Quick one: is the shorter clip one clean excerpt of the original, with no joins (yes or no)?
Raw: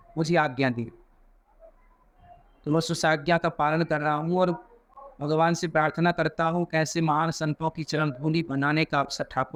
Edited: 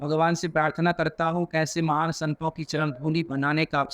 yes